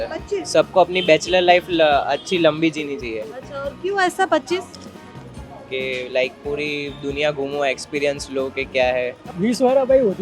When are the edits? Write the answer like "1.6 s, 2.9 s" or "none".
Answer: 9.2 s